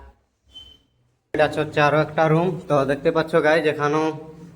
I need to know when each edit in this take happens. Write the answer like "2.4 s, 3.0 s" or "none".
1.4 s